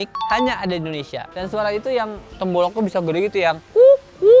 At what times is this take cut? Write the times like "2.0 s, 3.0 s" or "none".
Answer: 1.3 s